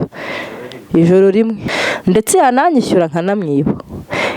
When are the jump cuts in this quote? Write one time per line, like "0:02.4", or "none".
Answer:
0:01.6